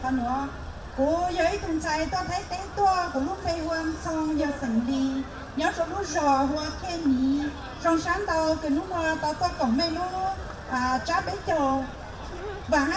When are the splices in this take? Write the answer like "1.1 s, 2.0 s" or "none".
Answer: 5.1 s